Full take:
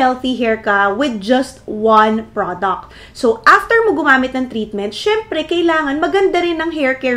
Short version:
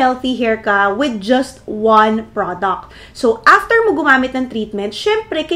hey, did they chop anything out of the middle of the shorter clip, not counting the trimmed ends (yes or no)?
no